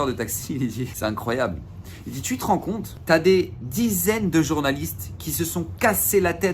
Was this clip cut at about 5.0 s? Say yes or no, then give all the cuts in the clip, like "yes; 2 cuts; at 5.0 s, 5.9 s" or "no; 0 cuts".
no; 2 cuts; at 0.9 s, 2.9 s